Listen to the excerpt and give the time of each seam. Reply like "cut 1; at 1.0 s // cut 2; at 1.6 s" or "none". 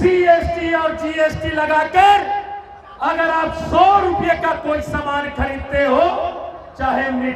none